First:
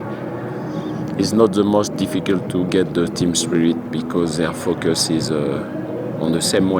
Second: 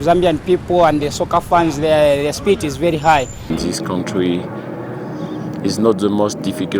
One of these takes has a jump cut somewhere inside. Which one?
second; 1 cut; at 3.5 s

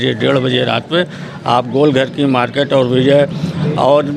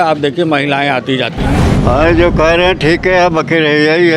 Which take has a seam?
second; 1 cut; at 1.4 s

